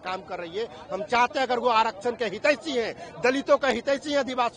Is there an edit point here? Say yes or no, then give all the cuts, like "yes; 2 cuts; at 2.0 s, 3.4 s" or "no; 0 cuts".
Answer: no; 0 cuts